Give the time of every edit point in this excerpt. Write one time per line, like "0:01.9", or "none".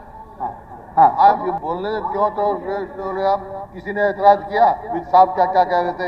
0:01.4

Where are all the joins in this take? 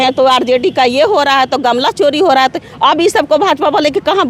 none

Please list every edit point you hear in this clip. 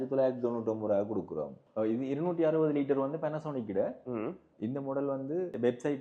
none

